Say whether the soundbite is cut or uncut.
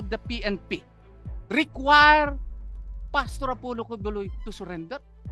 uncut